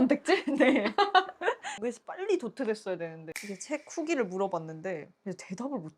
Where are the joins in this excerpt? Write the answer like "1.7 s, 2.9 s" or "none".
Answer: 1.8 s, 3.2 s